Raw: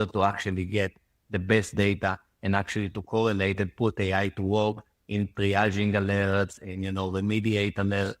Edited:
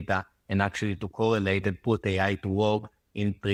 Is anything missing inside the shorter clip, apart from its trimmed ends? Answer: no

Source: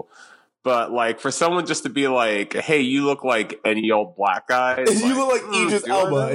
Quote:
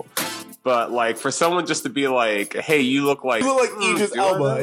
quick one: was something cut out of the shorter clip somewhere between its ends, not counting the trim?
yes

